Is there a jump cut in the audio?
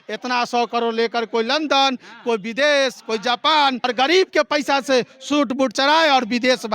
yes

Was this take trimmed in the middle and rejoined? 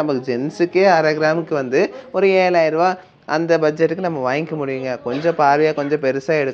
no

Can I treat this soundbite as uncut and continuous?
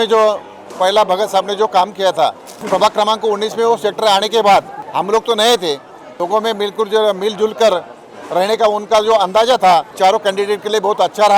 no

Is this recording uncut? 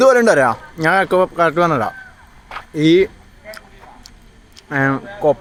yes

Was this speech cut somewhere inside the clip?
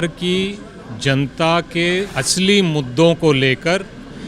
yes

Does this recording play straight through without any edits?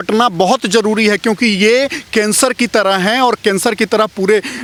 yes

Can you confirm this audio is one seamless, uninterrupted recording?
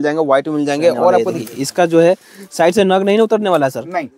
no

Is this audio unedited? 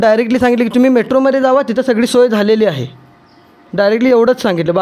yes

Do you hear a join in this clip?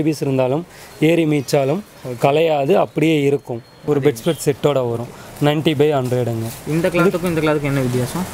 yes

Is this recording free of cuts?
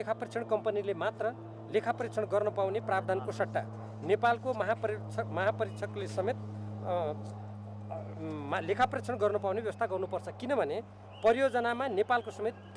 yes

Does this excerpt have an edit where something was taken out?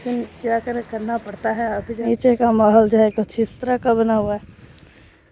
yes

